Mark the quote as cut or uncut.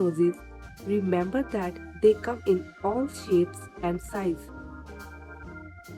cut